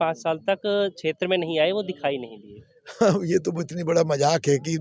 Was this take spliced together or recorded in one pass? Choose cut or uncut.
uncut